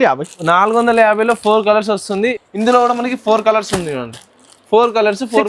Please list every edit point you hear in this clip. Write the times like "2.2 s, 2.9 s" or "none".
2.3 s